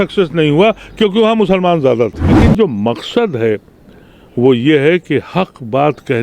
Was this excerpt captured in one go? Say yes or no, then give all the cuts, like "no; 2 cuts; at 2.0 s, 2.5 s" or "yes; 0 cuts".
no; 1 cut; at 2.4 s